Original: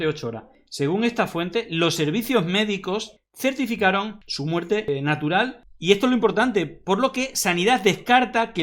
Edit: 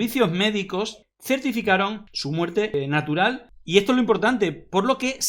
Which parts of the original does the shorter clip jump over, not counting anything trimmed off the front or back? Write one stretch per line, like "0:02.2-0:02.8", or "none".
none